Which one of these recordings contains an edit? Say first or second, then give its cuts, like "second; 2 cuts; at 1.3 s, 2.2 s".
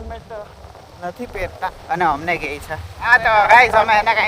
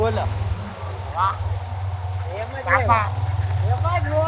first; 1 cut; at 3.1 s